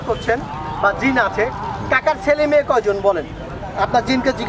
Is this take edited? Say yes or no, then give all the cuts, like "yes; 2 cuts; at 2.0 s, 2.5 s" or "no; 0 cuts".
no; 0 cuts